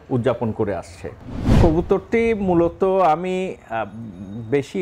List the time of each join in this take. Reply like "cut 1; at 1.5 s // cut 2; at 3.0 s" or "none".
cut 1; at 1.6 s